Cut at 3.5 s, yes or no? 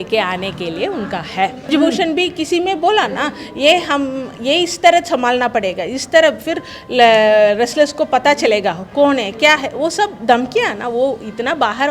no